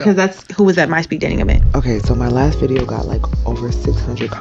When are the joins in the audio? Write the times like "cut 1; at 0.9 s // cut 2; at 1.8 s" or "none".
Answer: cut 1; at 1.6 s